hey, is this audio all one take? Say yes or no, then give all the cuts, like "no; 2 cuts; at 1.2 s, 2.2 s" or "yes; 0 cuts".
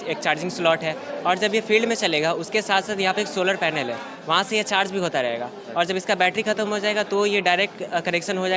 yes; 0 cuts